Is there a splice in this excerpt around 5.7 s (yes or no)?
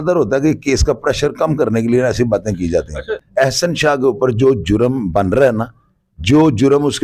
no